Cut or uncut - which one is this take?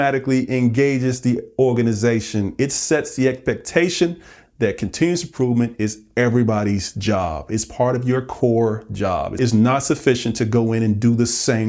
cut